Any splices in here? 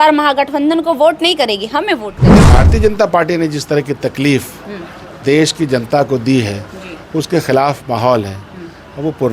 yes; 1 cut; at 2.4 s

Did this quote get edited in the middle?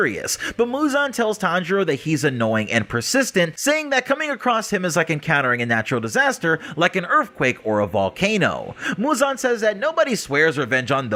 no; 0 cuts

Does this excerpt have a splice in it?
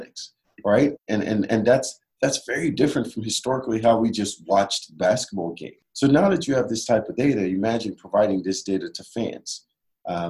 yes; 1 cut; at 5.7 s

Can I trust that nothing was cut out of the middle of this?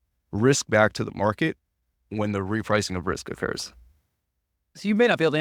yes; 0 cuts

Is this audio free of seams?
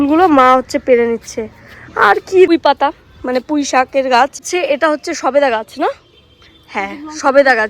no; 2 cuts; at 2.5 s, 4.5 s

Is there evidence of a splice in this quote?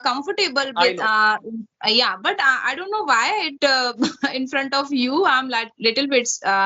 no; 0 cuts

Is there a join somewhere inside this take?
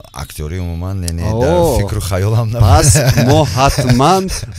no; 0 cuts

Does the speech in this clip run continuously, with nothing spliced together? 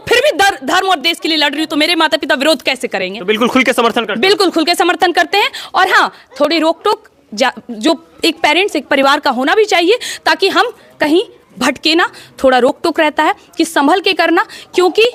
yes; 0 cuts

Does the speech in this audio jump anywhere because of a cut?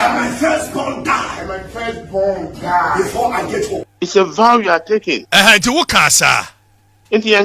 yes; 2 cuts; at 3.9 s, 5.2 s

